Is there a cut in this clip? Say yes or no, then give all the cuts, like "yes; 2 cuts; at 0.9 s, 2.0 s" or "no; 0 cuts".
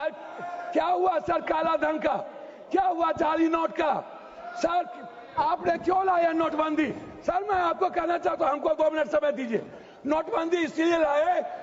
no; 0 cuts